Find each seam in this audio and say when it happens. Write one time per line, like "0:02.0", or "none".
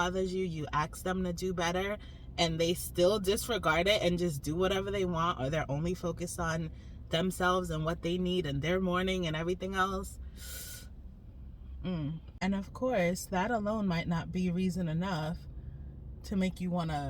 none